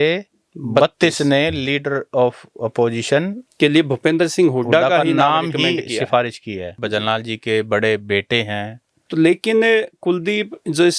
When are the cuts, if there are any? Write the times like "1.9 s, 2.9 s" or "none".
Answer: 6.7 s